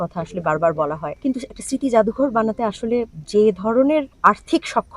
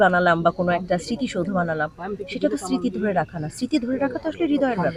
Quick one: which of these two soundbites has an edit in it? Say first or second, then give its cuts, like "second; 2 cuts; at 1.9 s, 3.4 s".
first; 3 cuts; at 1.1 s, 3.2 s, 4.1 s